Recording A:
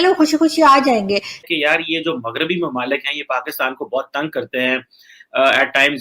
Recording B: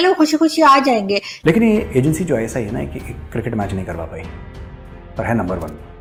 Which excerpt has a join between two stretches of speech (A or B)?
A